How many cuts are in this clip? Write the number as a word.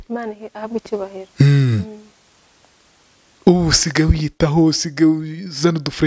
zero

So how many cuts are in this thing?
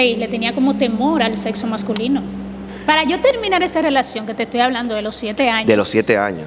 one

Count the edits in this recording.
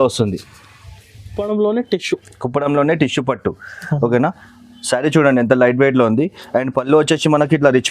one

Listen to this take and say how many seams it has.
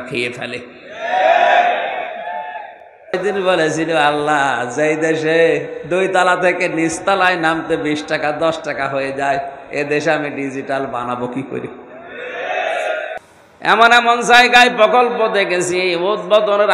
two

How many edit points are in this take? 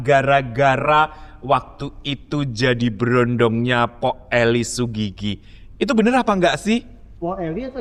zero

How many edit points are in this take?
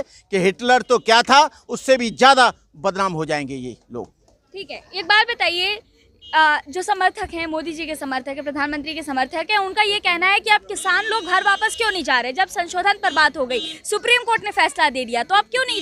zero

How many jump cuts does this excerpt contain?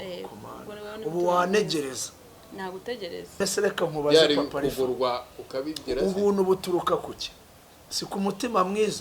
one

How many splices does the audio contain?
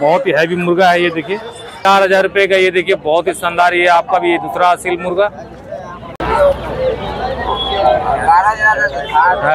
two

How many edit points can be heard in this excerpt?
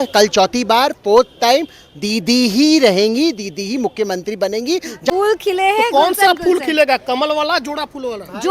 one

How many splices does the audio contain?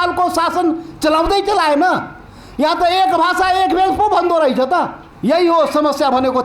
one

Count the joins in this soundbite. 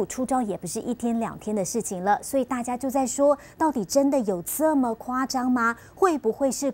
three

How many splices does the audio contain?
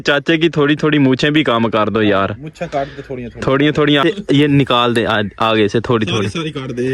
one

